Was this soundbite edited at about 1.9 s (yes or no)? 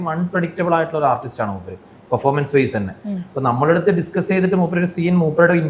no